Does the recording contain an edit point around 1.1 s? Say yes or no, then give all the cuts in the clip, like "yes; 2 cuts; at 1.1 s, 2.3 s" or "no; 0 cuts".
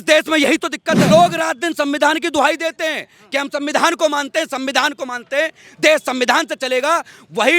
yes; 1 cut; at 1.1 s